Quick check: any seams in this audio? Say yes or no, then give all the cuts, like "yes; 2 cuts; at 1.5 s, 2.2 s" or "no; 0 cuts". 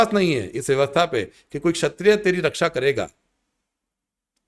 no; 0 cuts